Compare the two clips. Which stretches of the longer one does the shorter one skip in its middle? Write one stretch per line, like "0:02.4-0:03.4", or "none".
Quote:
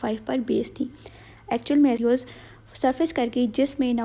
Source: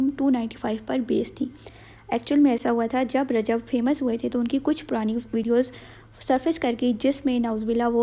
0:02.6-0:05.4